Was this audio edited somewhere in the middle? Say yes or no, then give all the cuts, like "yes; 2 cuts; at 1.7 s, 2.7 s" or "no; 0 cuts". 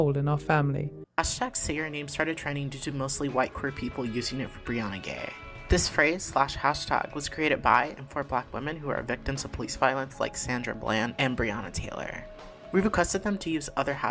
yes; 1 cut; at 0.9 s